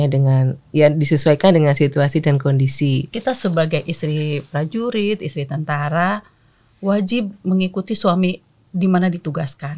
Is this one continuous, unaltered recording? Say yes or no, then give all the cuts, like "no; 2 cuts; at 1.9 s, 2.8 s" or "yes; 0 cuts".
no; 1 cut; at 3.1 s